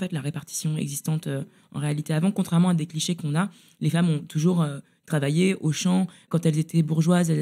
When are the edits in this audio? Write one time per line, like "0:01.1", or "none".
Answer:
0:06.2